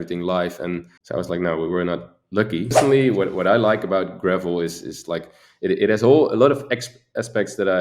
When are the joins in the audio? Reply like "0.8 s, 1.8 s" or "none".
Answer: 0.9 s, 2.8 s